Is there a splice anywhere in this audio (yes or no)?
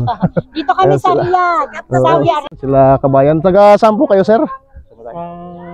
yes